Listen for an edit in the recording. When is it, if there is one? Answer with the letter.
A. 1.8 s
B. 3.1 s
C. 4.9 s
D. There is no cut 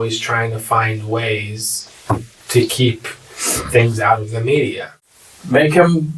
C